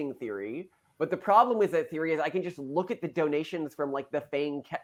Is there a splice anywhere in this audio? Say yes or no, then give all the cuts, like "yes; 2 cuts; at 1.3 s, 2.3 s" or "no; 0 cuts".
no; 0 cuts